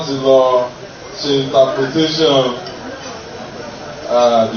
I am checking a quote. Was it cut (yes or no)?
no